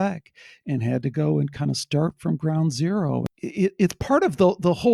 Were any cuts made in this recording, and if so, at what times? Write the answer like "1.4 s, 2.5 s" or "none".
3.2 s

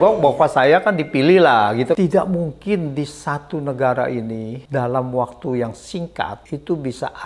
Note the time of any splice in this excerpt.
2.0 s, 4.5 s, 6.4 s

